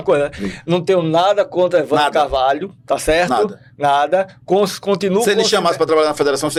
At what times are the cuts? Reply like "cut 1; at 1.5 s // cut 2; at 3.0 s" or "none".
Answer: none